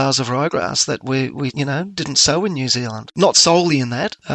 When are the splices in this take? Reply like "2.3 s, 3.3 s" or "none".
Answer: 3.1 s